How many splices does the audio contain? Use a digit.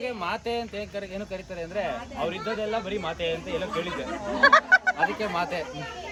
0